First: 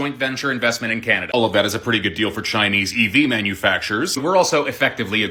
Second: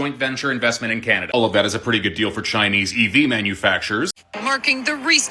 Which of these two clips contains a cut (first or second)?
second